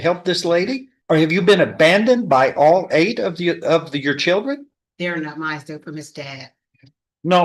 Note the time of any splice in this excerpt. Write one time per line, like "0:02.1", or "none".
0:00.9